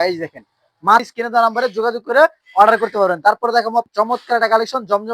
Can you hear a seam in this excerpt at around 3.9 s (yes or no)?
yes